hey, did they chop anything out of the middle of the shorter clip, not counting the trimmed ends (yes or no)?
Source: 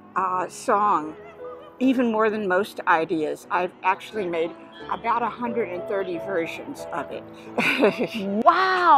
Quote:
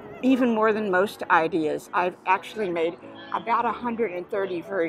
no